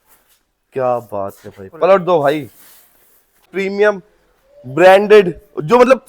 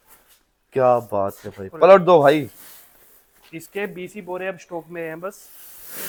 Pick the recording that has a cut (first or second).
first